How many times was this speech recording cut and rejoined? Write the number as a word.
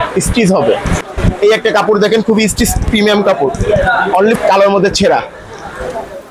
two